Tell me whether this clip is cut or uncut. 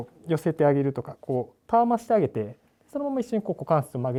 uncut